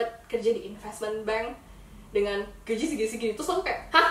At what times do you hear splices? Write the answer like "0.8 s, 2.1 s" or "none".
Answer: none